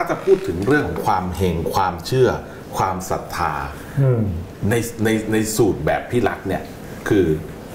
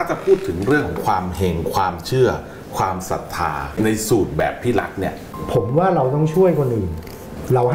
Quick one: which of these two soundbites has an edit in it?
second; 2 cuts; at 3.7 s, 5.3 s

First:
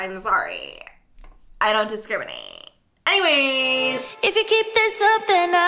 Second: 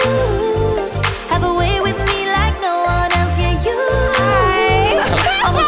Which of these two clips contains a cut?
first; 1 cut; at 4.0 s

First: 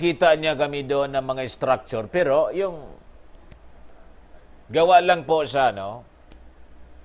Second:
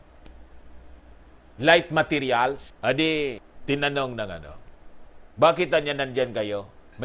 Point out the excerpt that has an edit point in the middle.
second; 2 cuts; at 2.7 s, 3.5 s

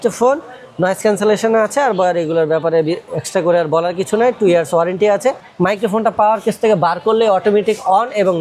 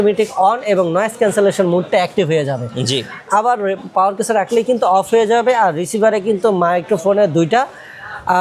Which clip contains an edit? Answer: first; 1 cut; at 5.5 s

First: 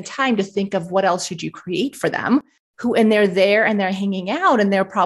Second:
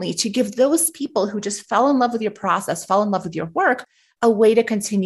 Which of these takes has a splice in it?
first; 1 cut; at 2.4 s

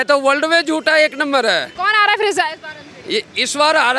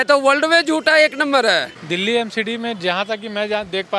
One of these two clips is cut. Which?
second; 1 cut; at 1.7 s

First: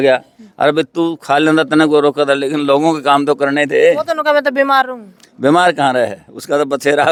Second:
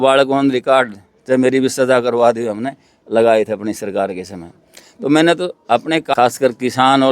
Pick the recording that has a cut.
second; 1 cut; at 6.1 s

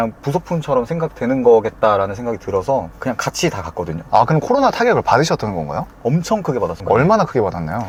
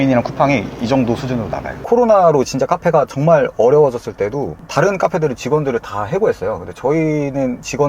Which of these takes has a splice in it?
second; 1 cut; at 1.7 s

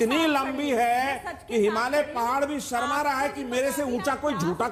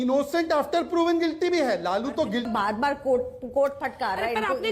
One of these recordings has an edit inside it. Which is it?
second; 1 cut; at 2.5 s

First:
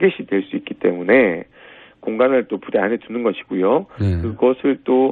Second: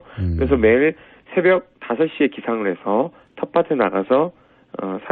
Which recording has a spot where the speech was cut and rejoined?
second; 1 cut; at 2.8 s

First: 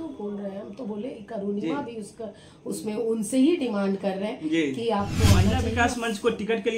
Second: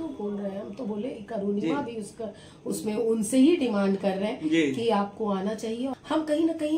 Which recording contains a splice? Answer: first; 1 cut; at 5.6 s

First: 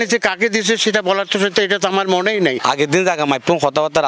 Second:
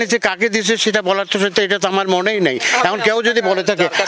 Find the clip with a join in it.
first; 1 cut; at 2.6 s

